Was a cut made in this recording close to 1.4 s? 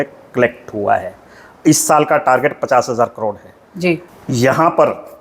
no; 1 cut; at 4.1 s

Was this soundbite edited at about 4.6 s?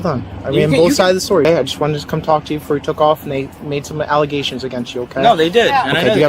no; 1 cut; at 1.5 s

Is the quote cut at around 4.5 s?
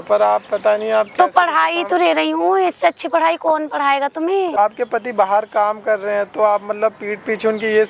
yes; 1 cut; at 4.5 s

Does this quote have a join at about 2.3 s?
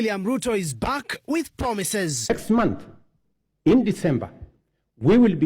yes; 1 cut; at 2.3 s

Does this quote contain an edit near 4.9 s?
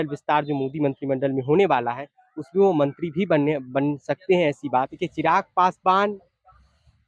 yes; 1 cut; at 4.9 s

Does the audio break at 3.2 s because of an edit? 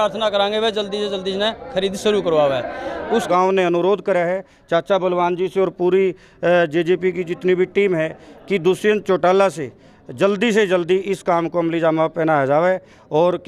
yes; 1 cut; at 3.2 s

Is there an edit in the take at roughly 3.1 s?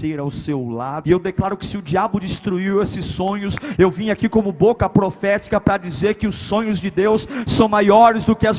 no; 1 cut; at 1.0 s

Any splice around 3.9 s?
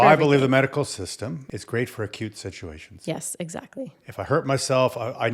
no; 1 cut; at 1.4 s

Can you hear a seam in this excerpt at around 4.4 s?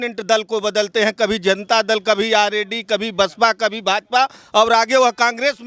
no; 0 cuts

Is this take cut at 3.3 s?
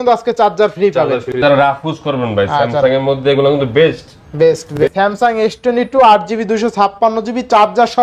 no; 2 cuts; at 1.3 s, 4.8 s

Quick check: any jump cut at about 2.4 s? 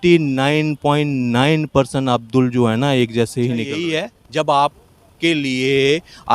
no; 1 cut; at 3.9 s

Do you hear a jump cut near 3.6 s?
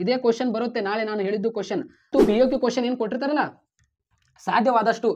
no; 1 cut; at 2.1 s

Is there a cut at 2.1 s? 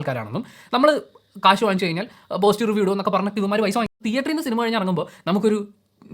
no; 1 cut; at 3.9 s

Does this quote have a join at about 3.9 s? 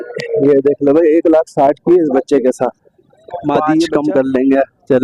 yes; 1 cut; at 3.9 s

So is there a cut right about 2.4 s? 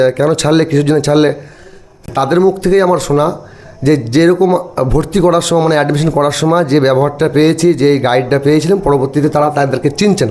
no; 0 cuts

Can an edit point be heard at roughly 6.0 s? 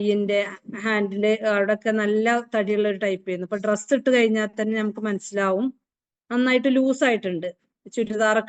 no; 0 cuts

